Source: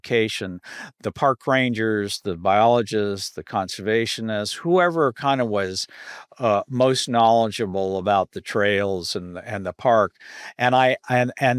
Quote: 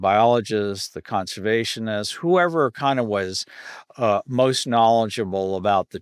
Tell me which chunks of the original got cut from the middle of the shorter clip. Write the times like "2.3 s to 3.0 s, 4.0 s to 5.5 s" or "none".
none